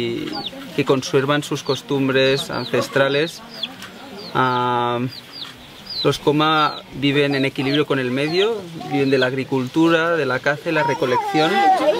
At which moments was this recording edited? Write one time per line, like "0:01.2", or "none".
none